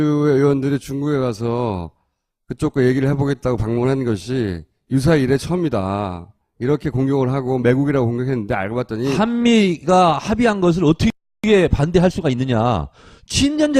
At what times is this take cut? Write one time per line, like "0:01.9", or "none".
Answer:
0:02.3